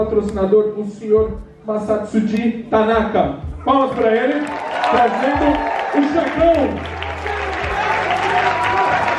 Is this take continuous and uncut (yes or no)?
yes